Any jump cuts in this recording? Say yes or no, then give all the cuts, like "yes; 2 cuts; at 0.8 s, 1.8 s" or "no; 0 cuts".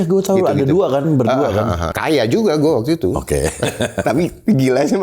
yes; 1 cut; at 1.9 s